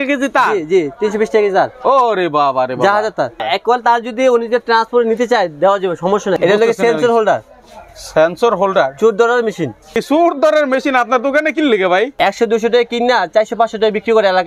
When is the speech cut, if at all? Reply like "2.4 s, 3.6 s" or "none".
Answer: 3.4 s, 6.4 s, 10.0 s, 12.1 s